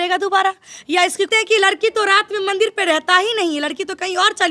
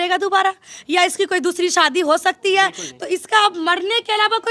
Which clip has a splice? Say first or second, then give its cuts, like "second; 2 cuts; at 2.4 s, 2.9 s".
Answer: first; 1 cut; at 1.3 s